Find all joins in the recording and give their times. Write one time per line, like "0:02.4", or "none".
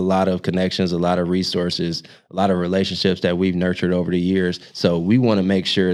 none